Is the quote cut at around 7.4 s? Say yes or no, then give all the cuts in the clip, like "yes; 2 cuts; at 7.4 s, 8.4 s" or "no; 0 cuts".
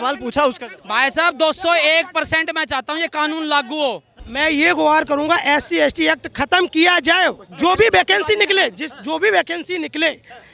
no; 1 cut; at 4.2 s